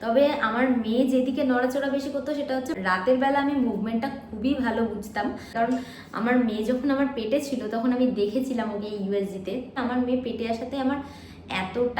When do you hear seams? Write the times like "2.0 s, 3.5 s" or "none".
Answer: 2.7 s, 5.5 s, 9.7 s

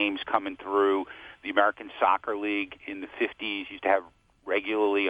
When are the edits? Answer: none

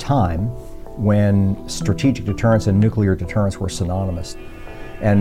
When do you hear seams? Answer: 4.3 s

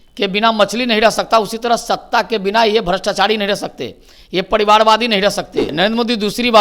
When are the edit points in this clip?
5.7 s

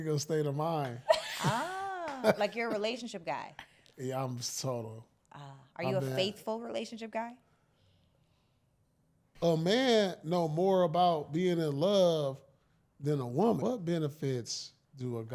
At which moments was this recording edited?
9.2 s, 13.6 s

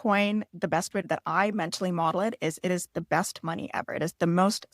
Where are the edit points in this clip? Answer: 1.0 s

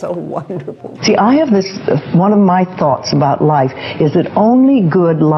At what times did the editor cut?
1.0 s

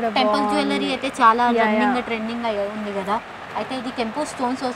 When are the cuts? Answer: none

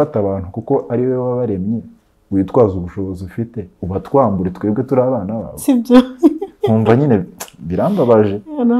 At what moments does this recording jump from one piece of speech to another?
none

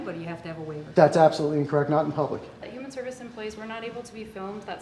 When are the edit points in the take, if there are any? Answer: 2.5 s

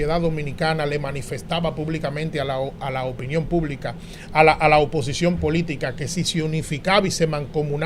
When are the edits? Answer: none

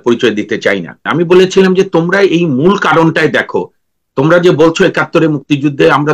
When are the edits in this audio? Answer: 1.0 s

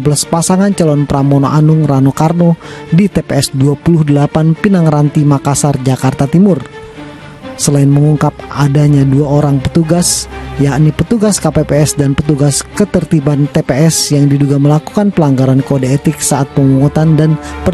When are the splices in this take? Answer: none

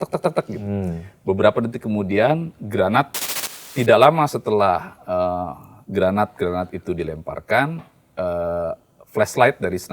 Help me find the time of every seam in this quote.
3.2 s

